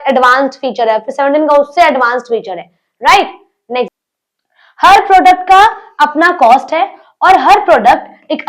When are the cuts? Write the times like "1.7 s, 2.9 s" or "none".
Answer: 3.9 s

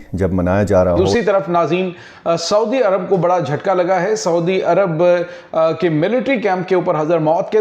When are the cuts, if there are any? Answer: 1.1 s

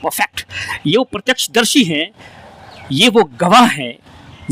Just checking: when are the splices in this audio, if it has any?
none

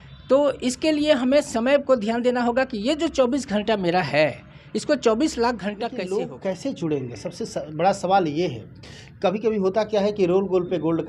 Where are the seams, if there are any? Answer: 6.0 s

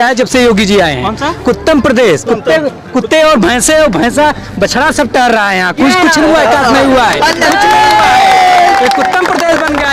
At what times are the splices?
none

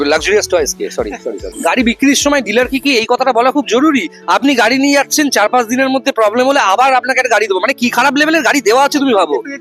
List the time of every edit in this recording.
1.5 s

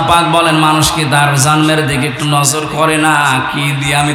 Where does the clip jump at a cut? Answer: none

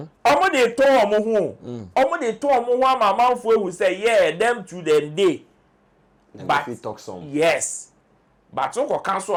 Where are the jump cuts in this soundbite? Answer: none

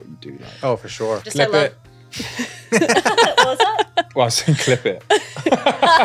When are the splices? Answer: 1.2 s

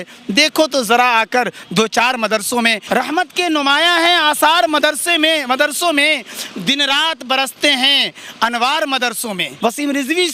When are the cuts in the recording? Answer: 2.8 s, 9.5 s

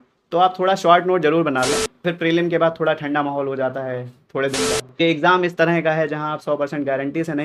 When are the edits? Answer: 1.9 s, 5.0 s

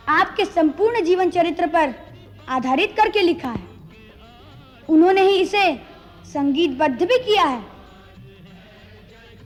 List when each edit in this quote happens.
none

